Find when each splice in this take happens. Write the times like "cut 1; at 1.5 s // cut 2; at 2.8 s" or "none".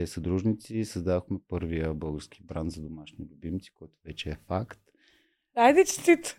none